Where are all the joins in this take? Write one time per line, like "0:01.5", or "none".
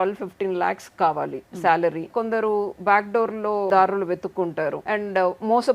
0:02.1
0:03.7
0:04.8

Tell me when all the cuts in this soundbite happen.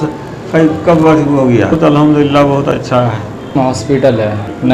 0:01.7
0:03.5

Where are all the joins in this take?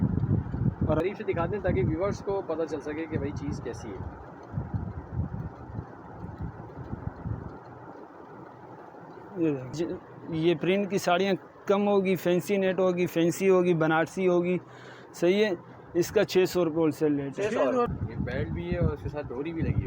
0:01.0
0:09.7
0:17.9

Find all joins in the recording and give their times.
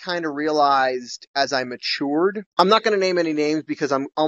none

